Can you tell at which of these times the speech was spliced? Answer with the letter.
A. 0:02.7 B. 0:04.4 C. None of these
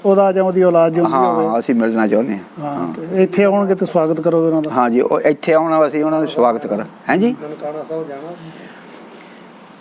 C